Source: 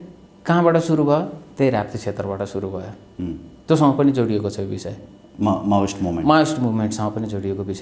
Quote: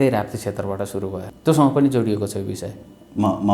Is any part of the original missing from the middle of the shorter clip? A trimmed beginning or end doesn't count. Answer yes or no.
yes